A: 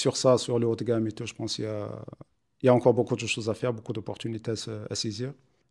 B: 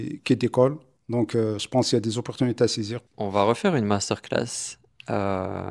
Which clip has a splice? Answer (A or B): B